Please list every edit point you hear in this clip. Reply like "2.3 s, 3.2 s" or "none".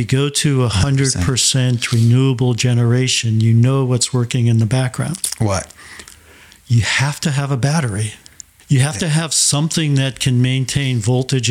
none